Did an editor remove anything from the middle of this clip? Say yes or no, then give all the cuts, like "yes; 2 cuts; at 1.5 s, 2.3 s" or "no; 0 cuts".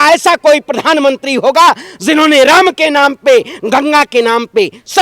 no; 0 cuts